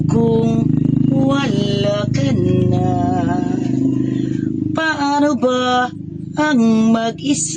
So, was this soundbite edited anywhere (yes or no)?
no